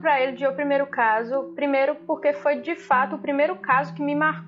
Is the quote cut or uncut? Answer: uncut